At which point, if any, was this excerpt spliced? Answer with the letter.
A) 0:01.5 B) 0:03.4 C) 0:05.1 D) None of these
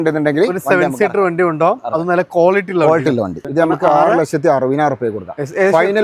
B